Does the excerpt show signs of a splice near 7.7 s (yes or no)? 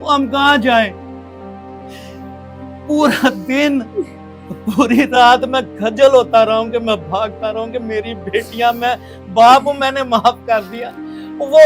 no